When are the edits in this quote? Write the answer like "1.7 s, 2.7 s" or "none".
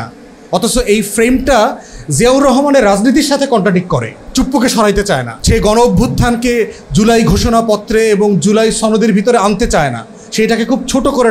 4.2 s, 5.3 s